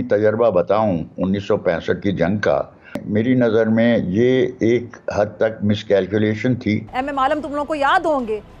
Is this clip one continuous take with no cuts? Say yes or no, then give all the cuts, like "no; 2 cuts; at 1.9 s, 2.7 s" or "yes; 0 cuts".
no; 2 cuts; at 3.0 s, 6.9 s